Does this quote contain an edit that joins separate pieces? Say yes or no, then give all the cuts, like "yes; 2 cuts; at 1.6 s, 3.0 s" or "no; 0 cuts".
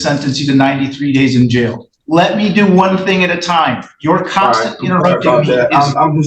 yes; 1 cut; at 1.9 s